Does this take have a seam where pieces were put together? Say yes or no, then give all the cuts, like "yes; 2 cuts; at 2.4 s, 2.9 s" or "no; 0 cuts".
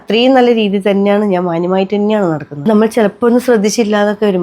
yes; 1 cut; at 2.6 s